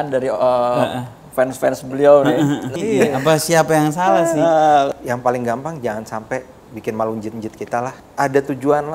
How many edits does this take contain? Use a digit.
3